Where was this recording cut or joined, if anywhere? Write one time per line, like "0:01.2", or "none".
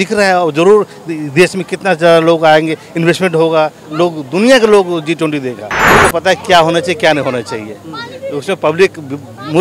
0:05.9